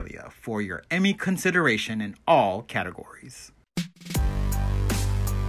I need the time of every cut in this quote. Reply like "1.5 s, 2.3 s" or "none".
3.6 s